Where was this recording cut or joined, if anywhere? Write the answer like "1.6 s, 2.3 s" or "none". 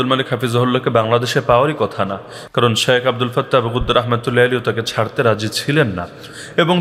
none